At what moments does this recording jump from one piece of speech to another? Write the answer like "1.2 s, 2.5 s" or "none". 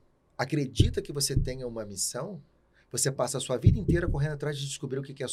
none